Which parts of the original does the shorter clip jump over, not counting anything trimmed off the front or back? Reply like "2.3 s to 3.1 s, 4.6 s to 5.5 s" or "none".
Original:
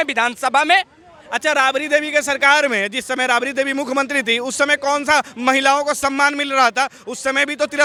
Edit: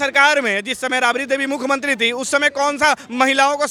none